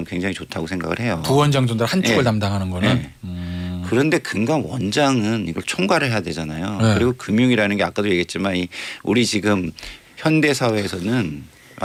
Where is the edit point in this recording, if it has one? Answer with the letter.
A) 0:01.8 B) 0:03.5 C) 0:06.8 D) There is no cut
D